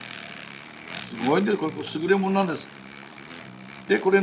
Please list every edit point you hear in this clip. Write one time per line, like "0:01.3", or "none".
none